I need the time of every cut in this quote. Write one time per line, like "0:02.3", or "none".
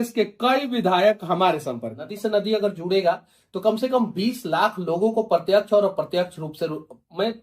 0:02.1